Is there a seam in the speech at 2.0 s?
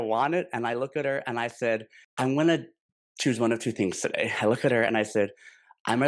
yes; 1 cut; at 2.0 s

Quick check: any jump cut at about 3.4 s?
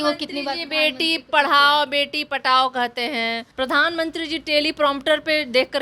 yes; 1 cut; at 3.4 s

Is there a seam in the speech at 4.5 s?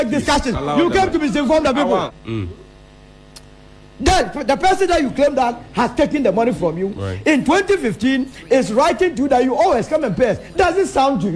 no; 1 cut; at 2.2 s

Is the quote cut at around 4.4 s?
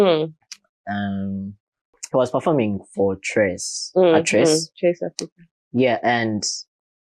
no; 1 cut; at 2.0 s

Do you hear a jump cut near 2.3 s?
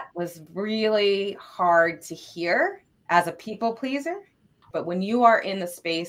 no; 1 cut; at 4.6 s

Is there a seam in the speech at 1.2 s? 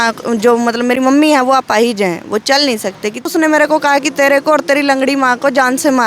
no; 1 cut; at 3.3 s

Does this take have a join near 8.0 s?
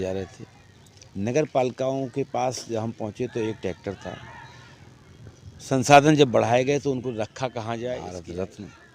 yes; 1 cut; at 8.0 s

